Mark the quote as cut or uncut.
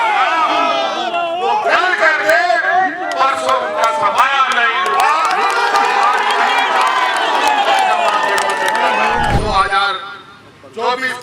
cut